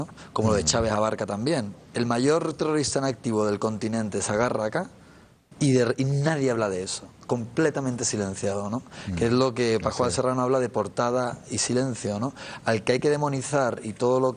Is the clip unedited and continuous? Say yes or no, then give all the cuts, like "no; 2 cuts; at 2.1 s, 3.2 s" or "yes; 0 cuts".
no; 1 cut; at 11.3 s